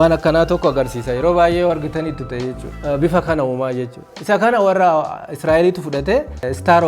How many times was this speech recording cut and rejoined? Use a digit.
1